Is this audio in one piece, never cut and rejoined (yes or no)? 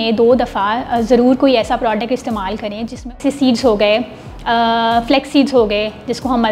no